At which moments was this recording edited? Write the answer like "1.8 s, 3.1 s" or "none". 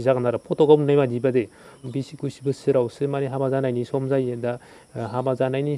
1.8 s